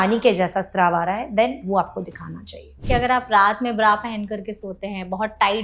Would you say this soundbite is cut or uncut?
cut